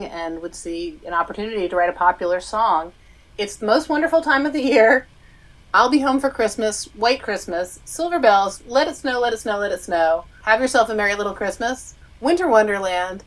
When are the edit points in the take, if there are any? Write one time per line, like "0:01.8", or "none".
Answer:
none